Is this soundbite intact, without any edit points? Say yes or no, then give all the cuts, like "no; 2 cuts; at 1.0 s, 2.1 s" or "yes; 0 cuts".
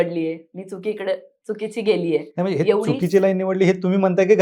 yes; 0 cuts